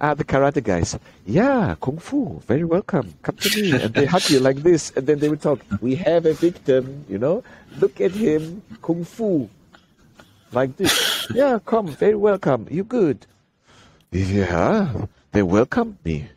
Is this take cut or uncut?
uncut